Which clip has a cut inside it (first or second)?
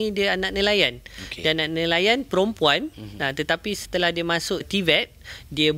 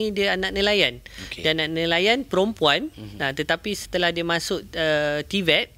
first